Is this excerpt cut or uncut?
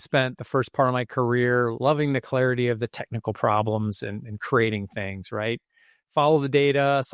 uncut